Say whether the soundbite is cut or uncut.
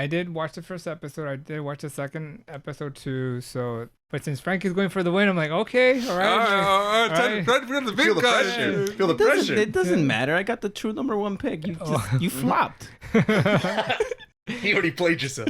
cut